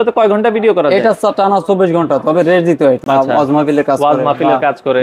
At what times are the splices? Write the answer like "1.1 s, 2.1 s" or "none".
3.0 s